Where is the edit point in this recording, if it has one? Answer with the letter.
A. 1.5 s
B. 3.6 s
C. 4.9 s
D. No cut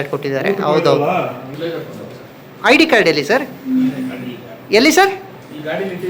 A